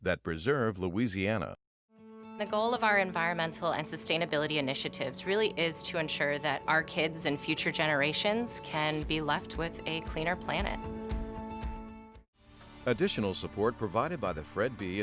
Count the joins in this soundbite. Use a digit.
1